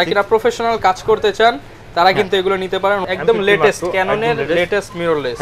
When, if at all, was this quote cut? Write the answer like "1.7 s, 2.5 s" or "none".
3.0 s